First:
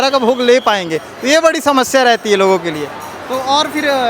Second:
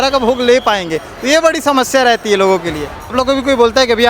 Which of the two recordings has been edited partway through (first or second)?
second